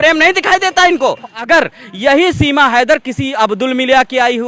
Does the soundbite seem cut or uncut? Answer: cut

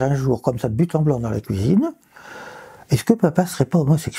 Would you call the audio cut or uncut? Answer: uncut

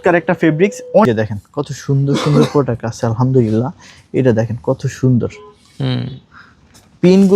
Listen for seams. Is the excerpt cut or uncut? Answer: cut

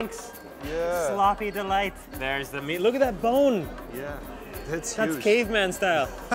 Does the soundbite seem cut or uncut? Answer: cut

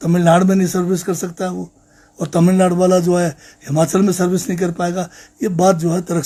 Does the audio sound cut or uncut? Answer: uncut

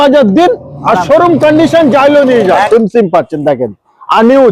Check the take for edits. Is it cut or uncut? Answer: cut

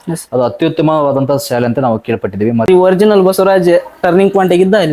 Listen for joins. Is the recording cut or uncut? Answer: cut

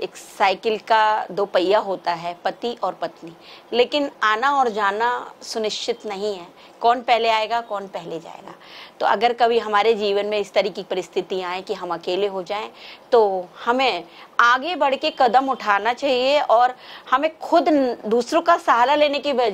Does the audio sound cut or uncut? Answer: uncut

